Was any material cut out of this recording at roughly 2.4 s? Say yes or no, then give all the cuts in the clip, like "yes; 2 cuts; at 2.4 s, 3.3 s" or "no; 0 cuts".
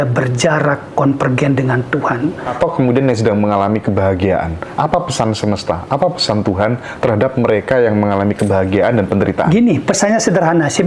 yes; 1 cut; at 2.4 s